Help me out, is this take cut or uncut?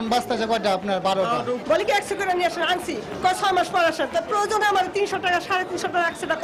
uncut